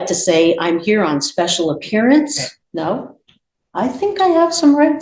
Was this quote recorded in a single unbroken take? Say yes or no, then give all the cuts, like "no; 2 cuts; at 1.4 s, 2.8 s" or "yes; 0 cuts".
no; 1 cut; at 2.5 s